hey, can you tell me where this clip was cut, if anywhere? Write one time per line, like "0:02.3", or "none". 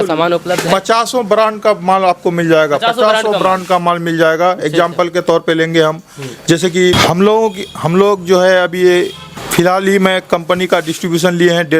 none